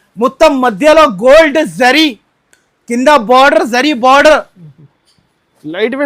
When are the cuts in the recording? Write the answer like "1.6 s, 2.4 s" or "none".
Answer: none